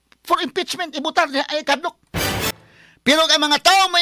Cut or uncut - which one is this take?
cut